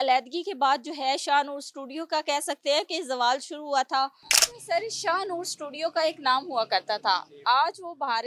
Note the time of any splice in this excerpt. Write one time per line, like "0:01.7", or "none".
0:04.3